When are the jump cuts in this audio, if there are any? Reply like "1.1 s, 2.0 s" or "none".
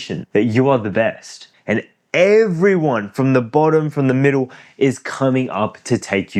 none